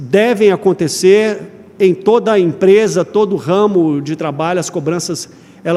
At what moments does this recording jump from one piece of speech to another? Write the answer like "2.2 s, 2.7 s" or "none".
none